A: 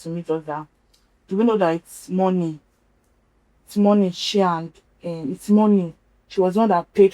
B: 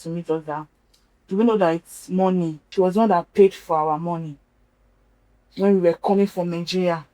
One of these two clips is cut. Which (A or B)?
B